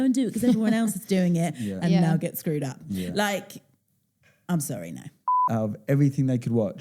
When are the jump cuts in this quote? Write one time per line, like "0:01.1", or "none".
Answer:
0:05.4